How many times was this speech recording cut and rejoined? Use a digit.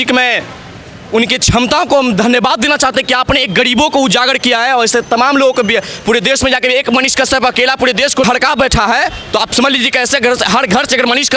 1